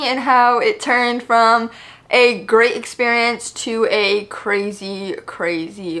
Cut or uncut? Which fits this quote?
uncut